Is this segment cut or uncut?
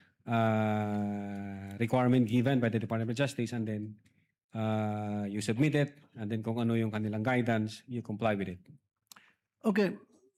uncut